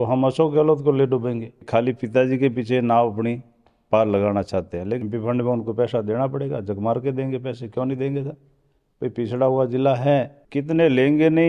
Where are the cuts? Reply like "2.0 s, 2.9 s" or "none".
1.7 s, 5.0 s, 10.4 s